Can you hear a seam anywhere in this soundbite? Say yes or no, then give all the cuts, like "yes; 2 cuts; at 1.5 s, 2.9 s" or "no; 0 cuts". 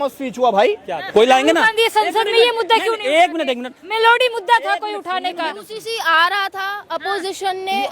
yes; 1 cut; at 1.0 s